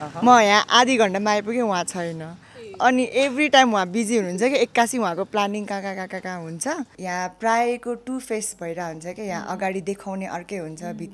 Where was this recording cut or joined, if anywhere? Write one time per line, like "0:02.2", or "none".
0:06.9